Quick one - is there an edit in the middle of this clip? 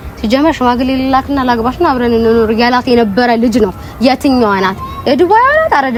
no; 0 cuts

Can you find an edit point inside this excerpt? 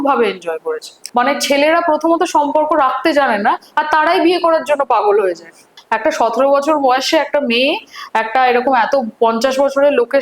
yes; 2 cuts; at 1.0 s, 5.7 s

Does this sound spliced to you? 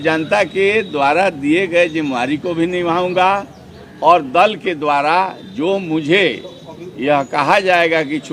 no; 0 cuts

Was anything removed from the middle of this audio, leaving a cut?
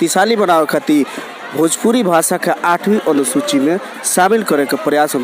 no; 0 cuts

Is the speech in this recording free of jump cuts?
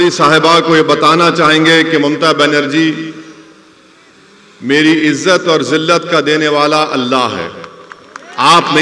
yes; 0 cuts

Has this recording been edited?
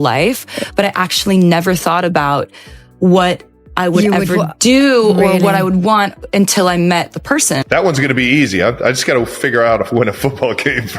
yes; 1 cut; at 7.6 s

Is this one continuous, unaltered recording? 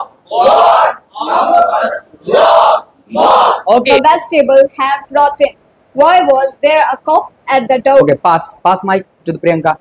no; 1 cut; at 3.9 s

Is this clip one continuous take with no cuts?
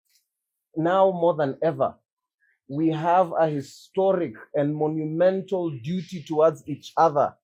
yes; 0 cuts

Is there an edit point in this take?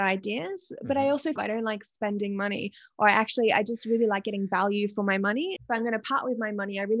yes; 2 cuts; at 1.4 s, 5.6 s

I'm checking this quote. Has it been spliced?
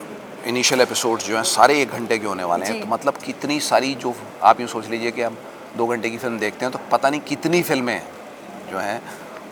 no; 0 cuts

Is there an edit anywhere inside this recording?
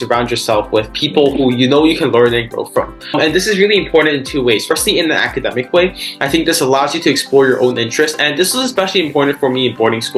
no; 0 cuts

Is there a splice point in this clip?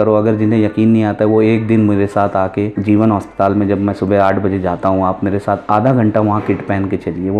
yes; 1 cut; at 2.7 s

